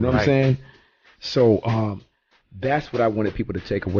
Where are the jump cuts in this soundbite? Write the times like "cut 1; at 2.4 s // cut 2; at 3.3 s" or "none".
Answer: cut 1; at 2.0 s